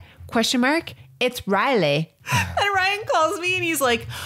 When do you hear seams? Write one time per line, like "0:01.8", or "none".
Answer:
0:02.2